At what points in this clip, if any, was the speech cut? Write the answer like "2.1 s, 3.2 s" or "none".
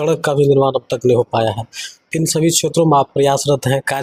none